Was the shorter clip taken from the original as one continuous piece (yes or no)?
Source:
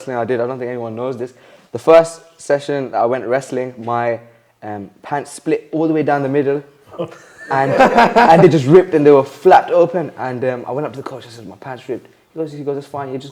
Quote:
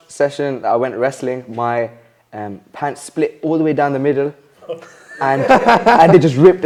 yes